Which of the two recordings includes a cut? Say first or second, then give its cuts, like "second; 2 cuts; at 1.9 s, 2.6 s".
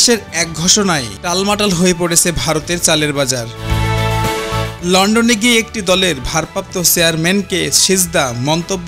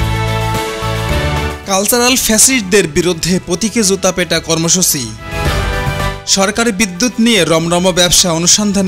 second; 3 cuts; at 1.6 s, 5.2 s, 6.2 s